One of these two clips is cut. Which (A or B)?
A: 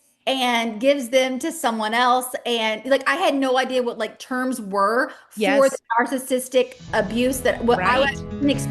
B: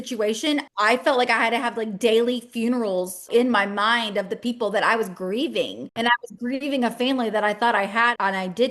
B